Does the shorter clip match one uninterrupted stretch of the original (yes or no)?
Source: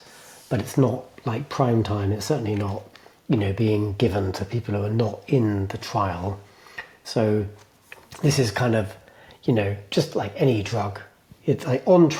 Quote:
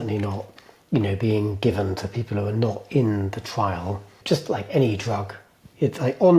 no